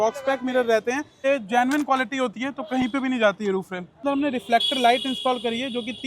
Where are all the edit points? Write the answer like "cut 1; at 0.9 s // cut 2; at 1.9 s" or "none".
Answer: cut 1; at 1.2 s // cut 2; at 4.0 s

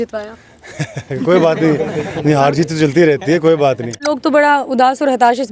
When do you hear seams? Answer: cut 1; at 4.0 s

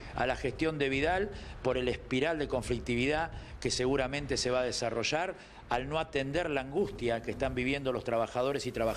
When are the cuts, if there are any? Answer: none

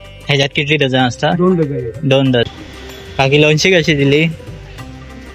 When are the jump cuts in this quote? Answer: cut 1; at 3.1 s

